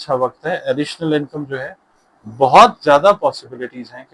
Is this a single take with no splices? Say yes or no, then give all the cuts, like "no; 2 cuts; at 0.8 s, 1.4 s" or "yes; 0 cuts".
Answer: yes; 0 cuts